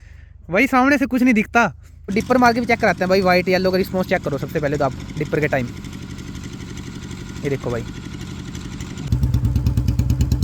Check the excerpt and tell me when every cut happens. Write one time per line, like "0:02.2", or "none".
0:02.1
0:09.1